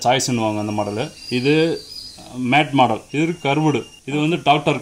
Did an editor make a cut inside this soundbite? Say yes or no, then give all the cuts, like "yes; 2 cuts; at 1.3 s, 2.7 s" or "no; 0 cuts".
yes; 3 cuts; at 1.2 s, 3.0 s, 4.0 s